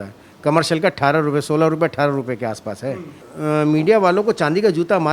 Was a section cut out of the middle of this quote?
yes; 1 cut; at 3.3 s

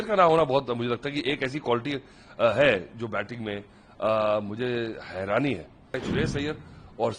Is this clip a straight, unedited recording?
no; 1 cut; at 5.9 s

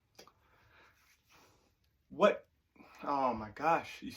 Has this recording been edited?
yes; 1 cut; at 2.1 s

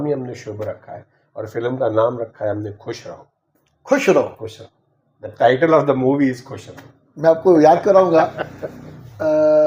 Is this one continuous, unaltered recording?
yes; 0 cuts

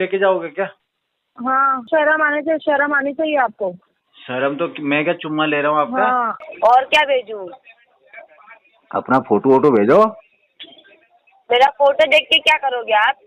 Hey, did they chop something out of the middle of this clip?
yes; 2 cuts; at 1.9 s, 6.4 s

